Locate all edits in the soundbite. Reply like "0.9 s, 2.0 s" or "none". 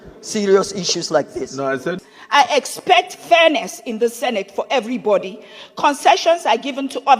2.0 s